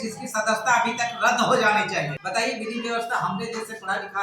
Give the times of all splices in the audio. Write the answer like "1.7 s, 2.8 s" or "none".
2.2 s